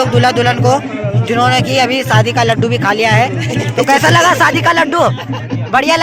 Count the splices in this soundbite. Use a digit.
0